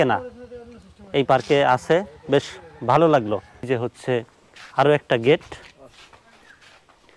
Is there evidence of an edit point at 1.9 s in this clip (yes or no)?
no